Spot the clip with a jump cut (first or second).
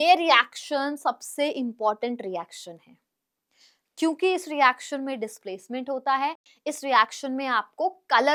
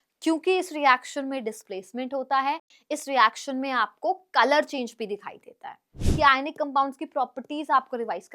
second